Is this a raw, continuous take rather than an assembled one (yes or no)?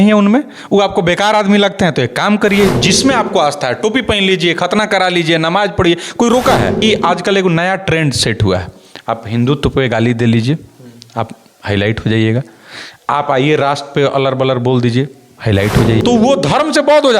no